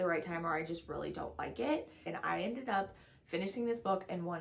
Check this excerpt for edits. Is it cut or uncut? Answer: cut